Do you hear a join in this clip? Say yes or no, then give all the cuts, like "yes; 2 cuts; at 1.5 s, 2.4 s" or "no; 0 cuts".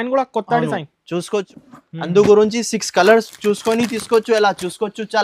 yes; 1 cut; at 1.5 s